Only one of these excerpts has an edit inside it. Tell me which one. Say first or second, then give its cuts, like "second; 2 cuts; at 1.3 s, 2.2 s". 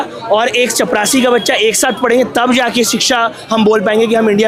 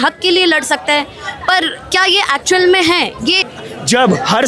second; 1 cut; at 3.4 s